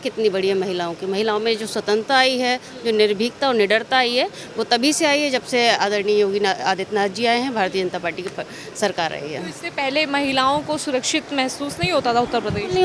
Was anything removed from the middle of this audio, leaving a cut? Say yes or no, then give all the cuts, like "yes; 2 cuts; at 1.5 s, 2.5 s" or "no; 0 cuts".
no; 0 cuts